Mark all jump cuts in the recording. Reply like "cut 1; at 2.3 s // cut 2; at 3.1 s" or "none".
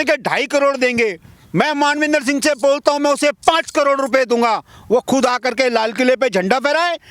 none